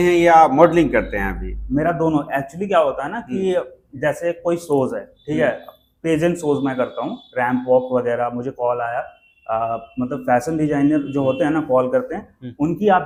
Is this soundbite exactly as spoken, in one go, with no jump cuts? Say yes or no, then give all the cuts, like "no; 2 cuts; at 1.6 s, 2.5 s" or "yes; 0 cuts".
yes; 0 cuts